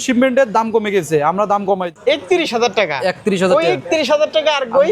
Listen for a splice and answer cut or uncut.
cut